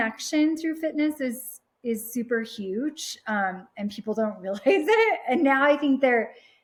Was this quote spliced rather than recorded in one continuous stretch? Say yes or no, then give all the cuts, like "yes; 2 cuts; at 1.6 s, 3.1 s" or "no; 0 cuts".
no; 0 cuts